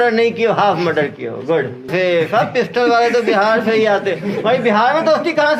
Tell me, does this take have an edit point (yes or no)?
yes